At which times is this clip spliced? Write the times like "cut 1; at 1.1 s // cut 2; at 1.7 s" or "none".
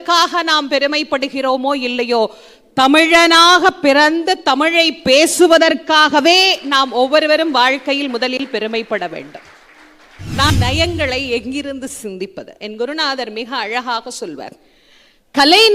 cut 1; at 10.5 s